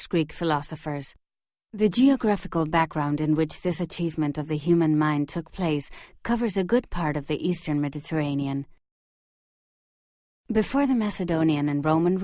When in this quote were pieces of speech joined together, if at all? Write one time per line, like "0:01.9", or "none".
0:04.2